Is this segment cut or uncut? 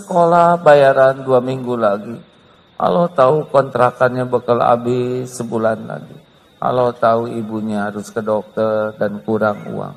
uncut